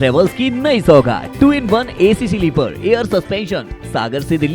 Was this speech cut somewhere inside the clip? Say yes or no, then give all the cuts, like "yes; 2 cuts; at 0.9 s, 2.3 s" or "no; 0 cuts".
no; 0 cuts